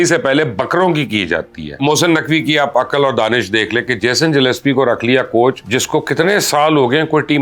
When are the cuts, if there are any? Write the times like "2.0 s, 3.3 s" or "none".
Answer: 1.8 s, 5.7 s